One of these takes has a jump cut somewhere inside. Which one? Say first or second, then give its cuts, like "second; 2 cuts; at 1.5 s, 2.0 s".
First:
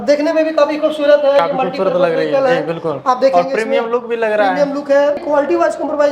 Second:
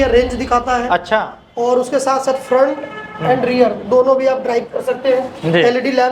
first; 1 cut; at 5.2 s